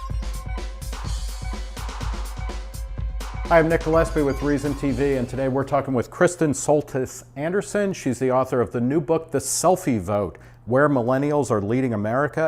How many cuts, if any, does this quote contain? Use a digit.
2